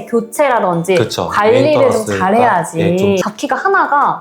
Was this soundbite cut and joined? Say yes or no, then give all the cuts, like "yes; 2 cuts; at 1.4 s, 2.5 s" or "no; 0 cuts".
yes; 1 cut; at 3.2 s